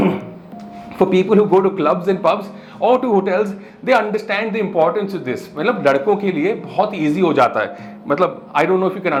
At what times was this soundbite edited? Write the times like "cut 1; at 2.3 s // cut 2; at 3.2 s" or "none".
none

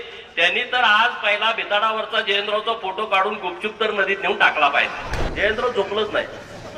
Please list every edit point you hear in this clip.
cut 1; at 5.2 s

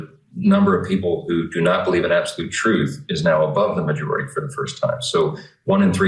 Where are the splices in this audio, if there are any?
none

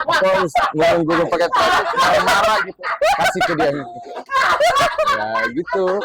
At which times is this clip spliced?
none

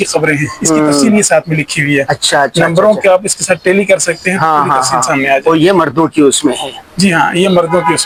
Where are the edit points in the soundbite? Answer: none

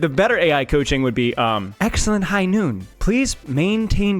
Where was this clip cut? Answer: cut 1; at 2.9 s

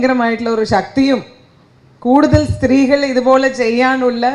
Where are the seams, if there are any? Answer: none

